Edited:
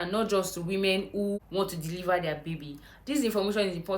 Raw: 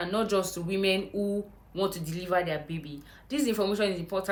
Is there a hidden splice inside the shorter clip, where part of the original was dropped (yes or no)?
yes